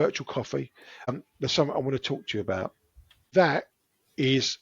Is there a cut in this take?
yes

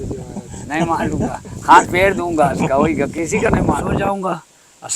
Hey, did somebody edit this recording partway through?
yes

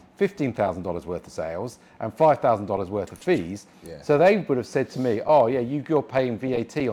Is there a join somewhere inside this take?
no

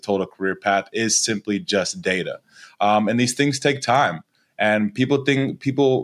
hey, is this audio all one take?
yes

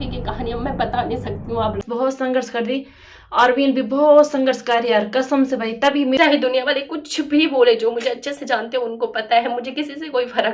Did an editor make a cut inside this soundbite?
yes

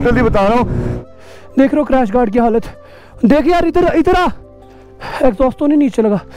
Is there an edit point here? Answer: yes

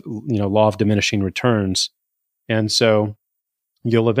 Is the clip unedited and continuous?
yes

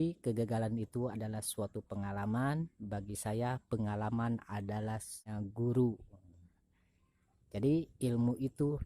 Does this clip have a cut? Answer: yes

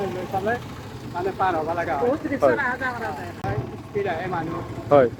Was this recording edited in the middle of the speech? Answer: yes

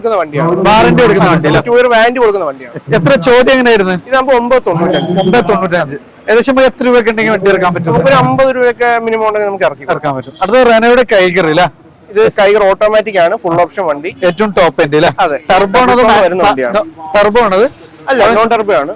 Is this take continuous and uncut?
yes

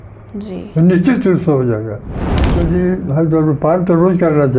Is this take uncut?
no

